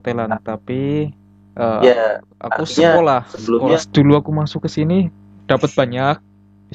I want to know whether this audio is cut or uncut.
cut